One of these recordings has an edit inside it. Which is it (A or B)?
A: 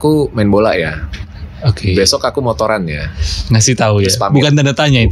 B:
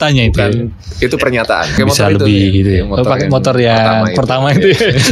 B